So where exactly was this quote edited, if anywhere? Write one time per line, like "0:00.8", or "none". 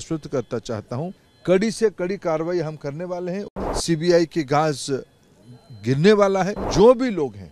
0:01.3
0:03.5
0:06.6